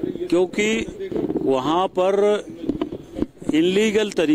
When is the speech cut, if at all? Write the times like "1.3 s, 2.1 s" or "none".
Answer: none